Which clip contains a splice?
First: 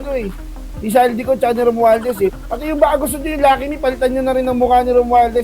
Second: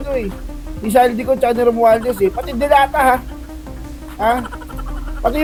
first; 1 cut; at 2.4 s

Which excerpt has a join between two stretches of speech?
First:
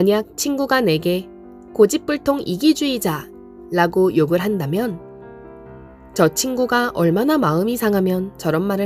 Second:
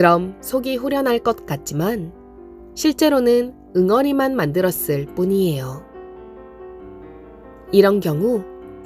second; 2 cuts; at 5.8 s, 7.7 s

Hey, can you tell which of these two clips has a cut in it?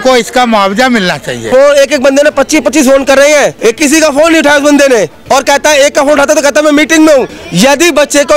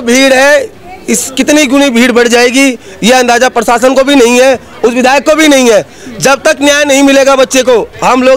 first; 4 cuts; at 1.4 s, 3.5 s, 5.2 s, 7.4 s

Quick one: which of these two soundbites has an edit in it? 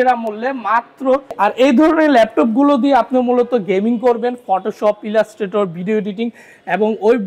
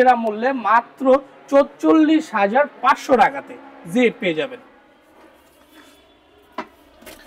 first; 1 cut; at 1.4 s

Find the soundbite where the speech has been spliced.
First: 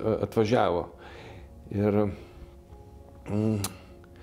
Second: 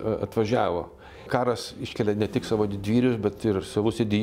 second; 1 cut; at 1.2 s

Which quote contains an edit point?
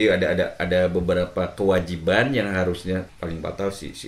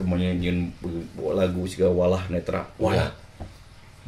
first; 1 cut; at 3.1 s

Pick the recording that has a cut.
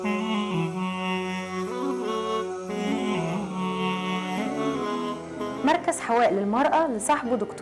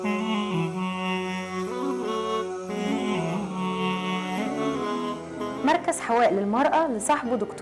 second; 2 cuts; at 2.0 s, 3.5 s

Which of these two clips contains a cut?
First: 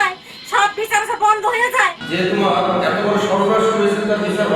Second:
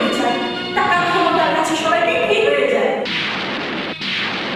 first; 1 cut; at 2.0 s

